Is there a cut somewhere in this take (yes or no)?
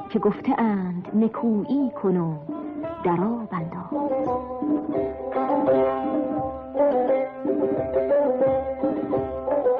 yes